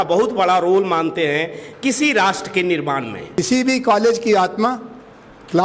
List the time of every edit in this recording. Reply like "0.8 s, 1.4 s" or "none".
3.3 s